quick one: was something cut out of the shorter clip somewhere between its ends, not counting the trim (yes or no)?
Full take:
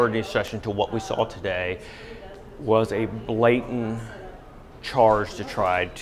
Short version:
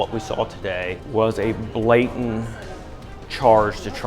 yes